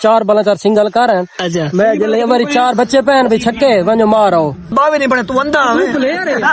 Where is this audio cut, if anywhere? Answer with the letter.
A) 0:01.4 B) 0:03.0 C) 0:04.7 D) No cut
C